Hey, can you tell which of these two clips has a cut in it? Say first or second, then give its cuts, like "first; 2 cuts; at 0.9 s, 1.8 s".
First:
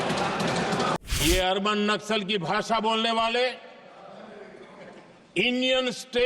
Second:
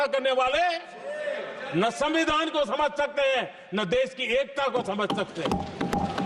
first; 1 cut; at 1.0 s